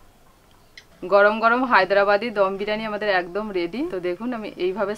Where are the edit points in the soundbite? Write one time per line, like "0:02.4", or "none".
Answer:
0:03.9